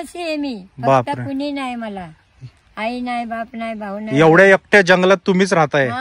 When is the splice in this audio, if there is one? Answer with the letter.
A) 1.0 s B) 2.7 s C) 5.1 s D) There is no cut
D